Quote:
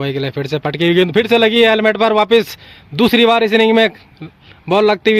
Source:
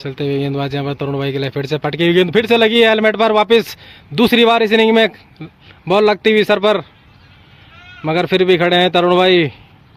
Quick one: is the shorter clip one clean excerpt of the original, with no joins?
yes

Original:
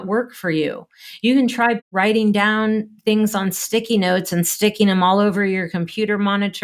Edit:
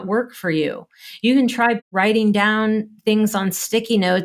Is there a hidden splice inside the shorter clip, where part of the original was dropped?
no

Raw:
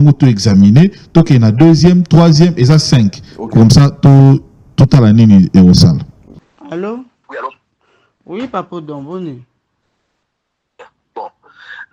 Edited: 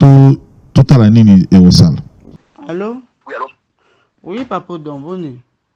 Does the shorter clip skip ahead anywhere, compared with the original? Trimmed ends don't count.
no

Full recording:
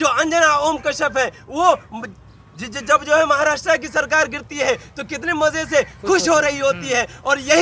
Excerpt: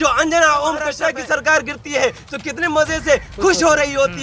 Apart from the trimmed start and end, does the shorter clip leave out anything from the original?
yes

